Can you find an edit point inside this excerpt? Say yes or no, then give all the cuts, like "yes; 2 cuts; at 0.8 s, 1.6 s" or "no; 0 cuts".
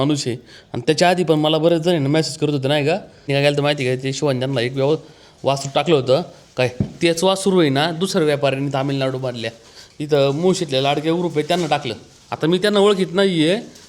yes; 1 cut; at 3.3 s